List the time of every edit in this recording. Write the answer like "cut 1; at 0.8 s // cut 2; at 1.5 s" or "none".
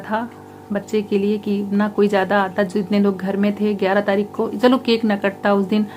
none